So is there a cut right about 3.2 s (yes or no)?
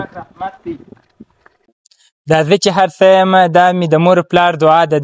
no